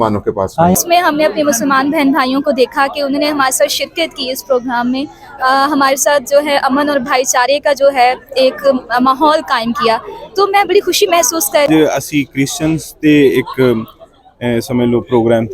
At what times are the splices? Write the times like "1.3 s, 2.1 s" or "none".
0.8 s, 11.7 s